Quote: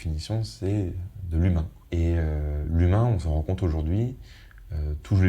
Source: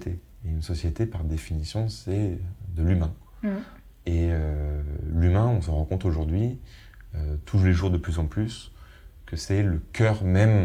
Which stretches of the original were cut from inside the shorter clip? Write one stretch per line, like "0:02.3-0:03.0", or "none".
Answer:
0:03.2-0:03.9
0:04.7-0:05.0